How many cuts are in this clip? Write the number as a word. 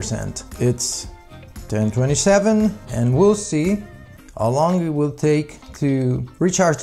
zero